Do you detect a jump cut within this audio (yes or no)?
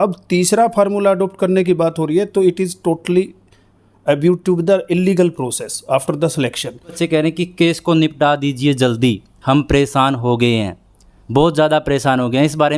yes